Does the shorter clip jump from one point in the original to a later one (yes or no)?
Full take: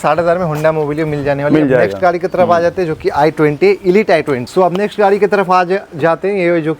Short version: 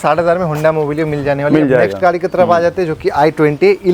no